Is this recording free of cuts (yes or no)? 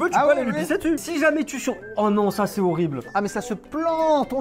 no